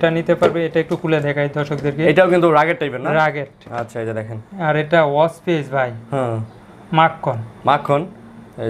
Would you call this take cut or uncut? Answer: uncut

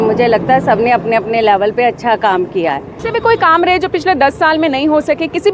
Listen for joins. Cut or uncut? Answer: cut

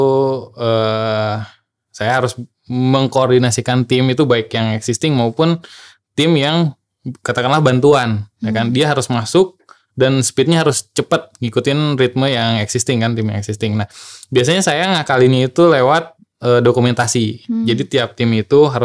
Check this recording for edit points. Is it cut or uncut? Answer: uncut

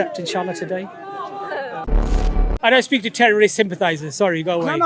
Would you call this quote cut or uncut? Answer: cut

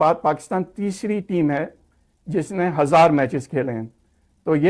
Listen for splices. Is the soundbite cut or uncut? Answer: uncut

